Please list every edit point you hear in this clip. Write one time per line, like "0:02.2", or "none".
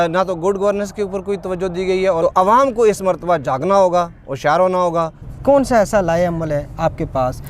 0:02.2
0:05.2